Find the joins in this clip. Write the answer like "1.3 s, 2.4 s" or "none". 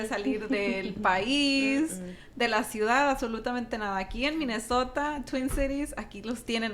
none